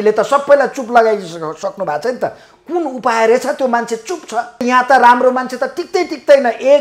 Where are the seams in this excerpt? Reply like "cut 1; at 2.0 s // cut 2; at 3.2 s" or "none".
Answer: cut 1; at 4.6 s